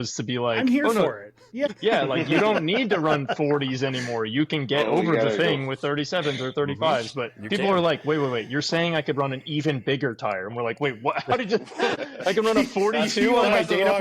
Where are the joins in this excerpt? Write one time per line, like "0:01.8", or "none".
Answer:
0:01.7
0:12.0